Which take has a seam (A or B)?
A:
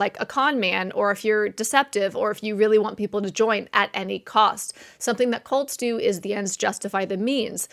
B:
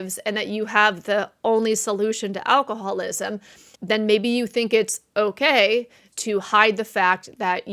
B